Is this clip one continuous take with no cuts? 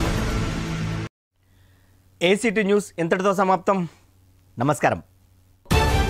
yes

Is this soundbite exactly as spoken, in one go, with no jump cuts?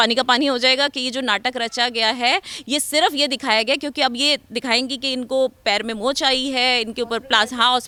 yes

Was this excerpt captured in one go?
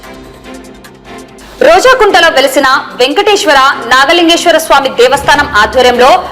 no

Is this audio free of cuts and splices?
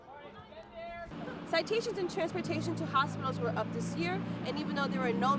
no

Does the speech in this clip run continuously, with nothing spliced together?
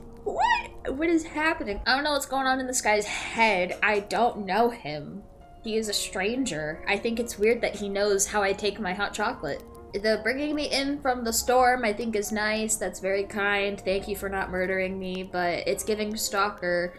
no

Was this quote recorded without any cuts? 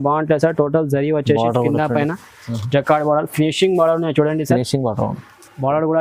yes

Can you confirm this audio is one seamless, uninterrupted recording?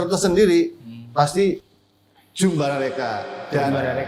yes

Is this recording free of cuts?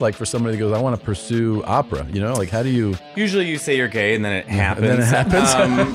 yes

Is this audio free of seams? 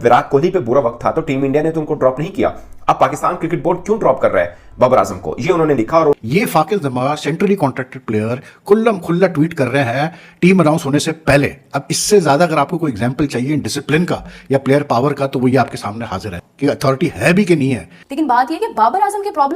no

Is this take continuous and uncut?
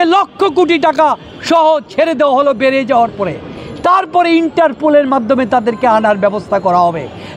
yes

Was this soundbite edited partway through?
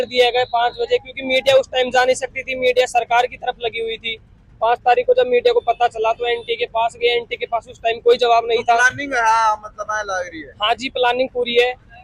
no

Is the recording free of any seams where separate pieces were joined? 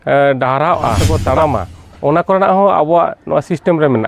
no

